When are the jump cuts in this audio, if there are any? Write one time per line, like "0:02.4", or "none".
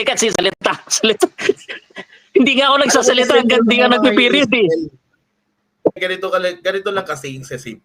0:06.0